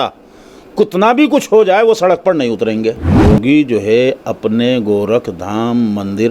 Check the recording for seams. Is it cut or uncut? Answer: cut